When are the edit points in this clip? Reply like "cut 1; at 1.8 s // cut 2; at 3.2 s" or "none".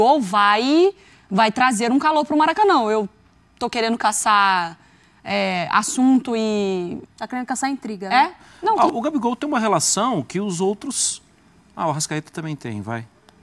cut 1; at 8.8 s